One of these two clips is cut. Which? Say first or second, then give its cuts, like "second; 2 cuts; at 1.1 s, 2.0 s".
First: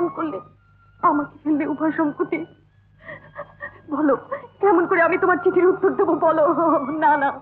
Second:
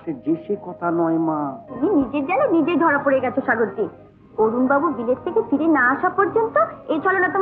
second; 1 cut; at 1.6 s